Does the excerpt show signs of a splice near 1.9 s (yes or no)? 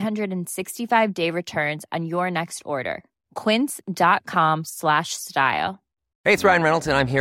no